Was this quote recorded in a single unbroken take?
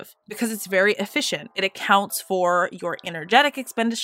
yes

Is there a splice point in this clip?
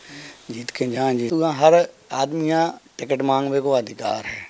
yes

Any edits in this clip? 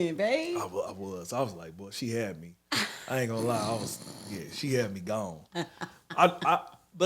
no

